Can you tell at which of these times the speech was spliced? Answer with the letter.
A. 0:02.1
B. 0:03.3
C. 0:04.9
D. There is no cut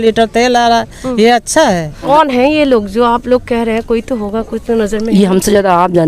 A